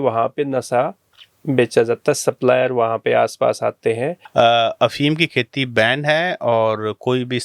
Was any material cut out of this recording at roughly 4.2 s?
yes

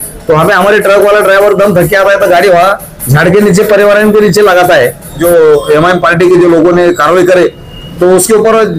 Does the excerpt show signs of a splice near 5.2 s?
yes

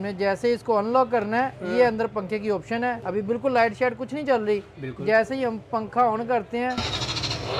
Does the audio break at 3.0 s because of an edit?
yes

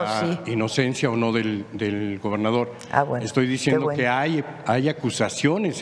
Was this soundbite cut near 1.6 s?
no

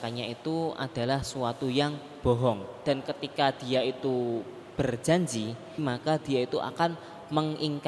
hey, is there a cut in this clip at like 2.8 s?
yes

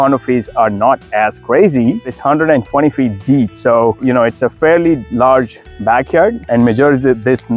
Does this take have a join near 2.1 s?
yes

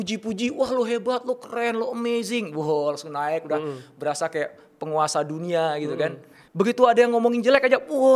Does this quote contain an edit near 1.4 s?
no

